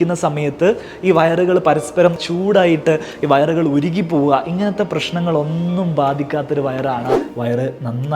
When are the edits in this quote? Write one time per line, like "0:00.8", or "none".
0:02.2
0:07.2

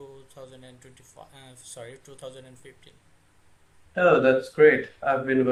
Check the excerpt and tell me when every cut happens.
none

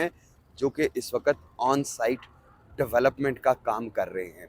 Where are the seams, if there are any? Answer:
none

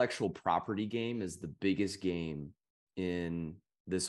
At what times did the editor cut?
none

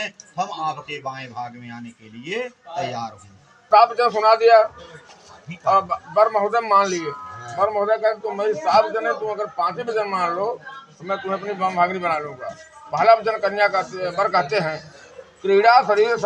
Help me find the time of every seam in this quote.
0:03.7

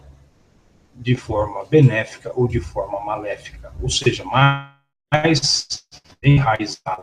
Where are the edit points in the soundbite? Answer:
0:03.4

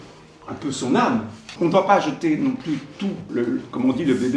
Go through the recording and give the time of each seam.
0:01.4
0:03.2

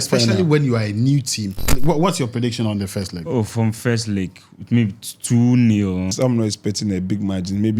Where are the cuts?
0:01.7
0:06.1

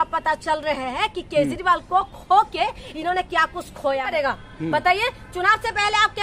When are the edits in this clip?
0:04.1

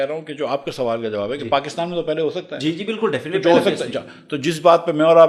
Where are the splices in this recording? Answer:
none

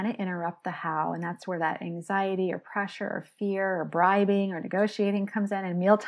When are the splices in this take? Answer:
none

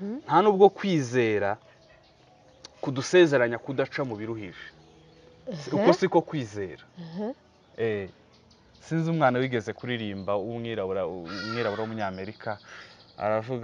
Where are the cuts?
none

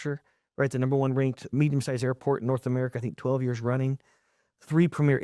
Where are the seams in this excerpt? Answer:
0:01.5

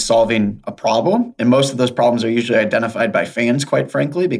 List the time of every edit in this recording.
none

